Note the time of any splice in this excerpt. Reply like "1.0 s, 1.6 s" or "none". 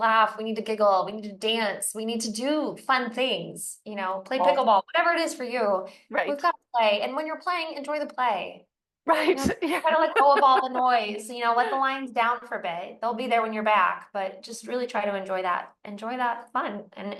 none

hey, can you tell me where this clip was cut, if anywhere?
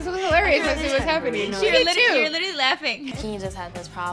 3.1 s

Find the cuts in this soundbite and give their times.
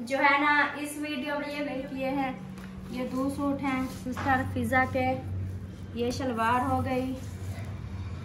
1.5 s

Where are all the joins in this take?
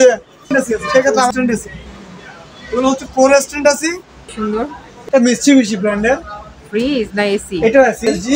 1.3 s, 4.3 s

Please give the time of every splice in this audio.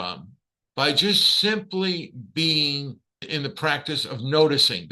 3.3 s

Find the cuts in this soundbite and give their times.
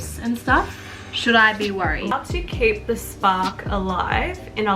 2.1 s

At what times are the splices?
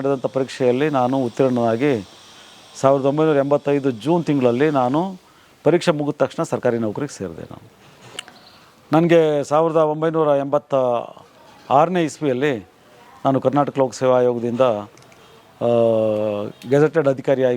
8.1 s

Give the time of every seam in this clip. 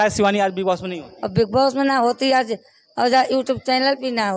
none

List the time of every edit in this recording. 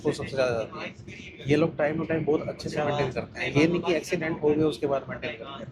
none

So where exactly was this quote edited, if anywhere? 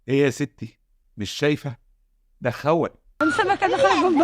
3.0 s

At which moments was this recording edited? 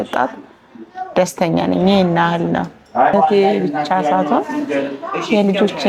3.1 s

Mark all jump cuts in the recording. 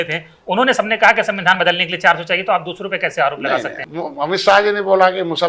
3.8 s

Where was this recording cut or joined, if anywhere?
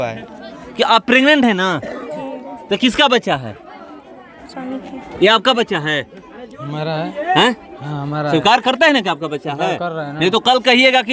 none

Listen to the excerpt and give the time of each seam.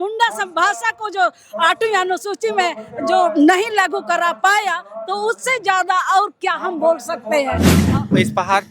7.7 s

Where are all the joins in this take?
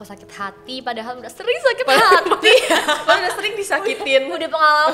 none

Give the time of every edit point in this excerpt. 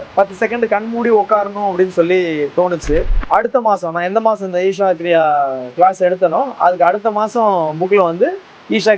3.1 s

